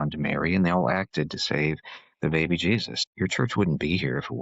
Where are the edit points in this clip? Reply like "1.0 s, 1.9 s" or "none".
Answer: 3.0 s

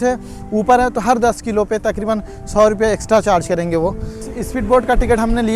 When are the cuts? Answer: 4.3 s

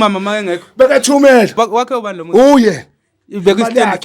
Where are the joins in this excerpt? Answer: 1.6 s

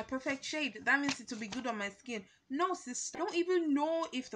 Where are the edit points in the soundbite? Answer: 3.1 s

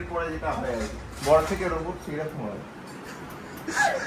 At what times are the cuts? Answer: none

